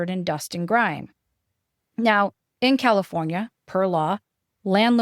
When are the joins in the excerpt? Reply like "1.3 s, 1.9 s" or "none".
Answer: 2.4 s

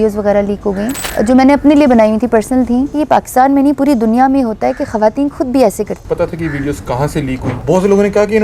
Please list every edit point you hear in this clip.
1.0 s, 3.0 s, 6.0 s, 7.5 s

